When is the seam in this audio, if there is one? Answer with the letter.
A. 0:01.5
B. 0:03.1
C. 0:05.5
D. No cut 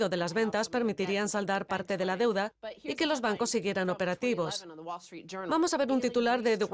A